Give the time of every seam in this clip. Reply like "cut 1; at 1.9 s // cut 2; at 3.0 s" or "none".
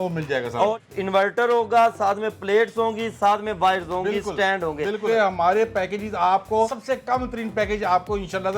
cut 1; at 0.8 s // cut 2; at 5.0 s // cut 3; at 6.8 s